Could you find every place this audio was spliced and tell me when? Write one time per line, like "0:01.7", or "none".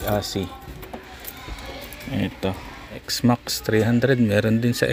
0:03.1